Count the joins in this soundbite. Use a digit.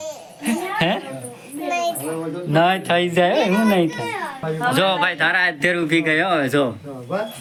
0